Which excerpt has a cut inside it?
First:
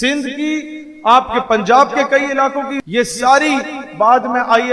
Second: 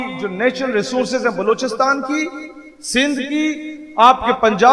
first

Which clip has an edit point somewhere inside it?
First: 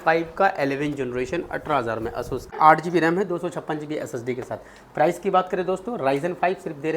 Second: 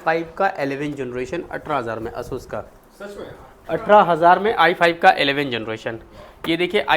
first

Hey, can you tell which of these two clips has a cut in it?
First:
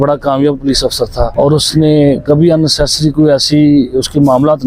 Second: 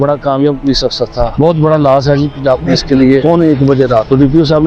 second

